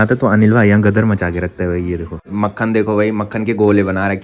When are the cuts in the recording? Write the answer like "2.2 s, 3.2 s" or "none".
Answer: 2.3 s